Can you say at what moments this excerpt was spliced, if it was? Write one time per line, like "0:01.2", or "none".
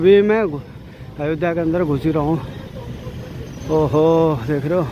none